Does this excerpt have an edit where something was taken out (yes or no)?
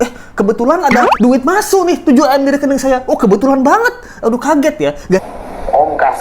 yes